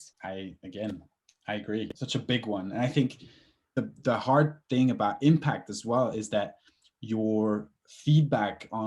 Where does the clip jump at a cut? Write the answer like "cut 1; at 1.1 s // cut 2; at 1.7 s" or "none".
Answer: cut 1; at 3.7 s